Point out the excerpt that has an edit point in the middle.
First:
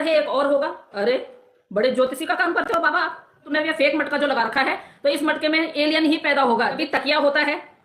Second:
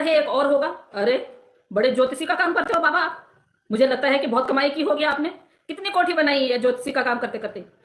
first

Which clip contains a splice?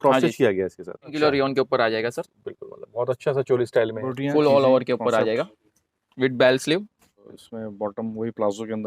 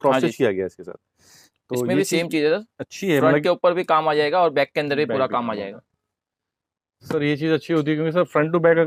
first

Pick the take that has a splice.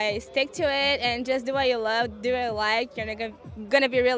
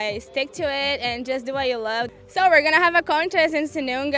second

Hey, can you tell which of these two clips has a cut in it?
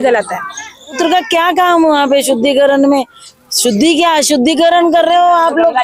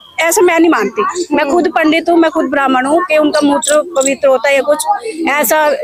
first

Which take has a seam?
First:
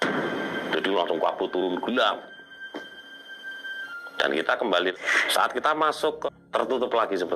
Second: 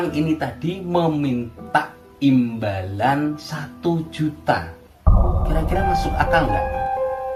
first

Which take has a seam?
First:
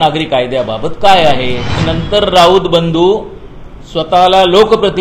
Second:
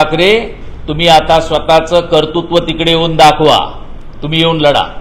first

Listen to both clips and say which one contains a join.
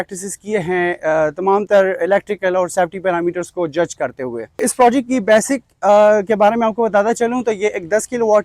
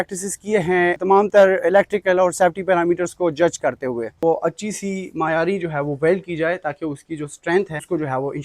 second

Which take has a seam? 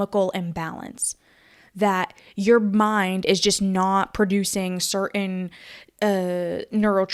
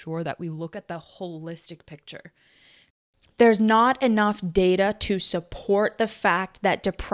second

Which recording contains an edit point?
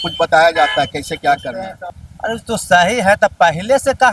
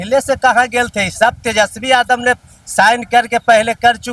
first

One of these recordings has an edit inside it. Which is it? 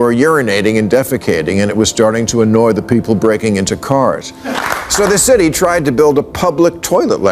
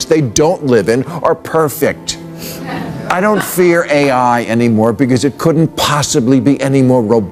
first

